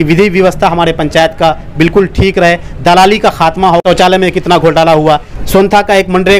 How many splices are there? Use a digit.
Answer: 2